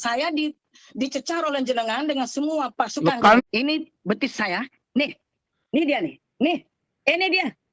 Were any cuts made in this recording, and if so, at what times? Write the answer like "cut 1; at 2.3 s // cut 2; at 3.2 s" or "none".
cut 1; at 3.4 s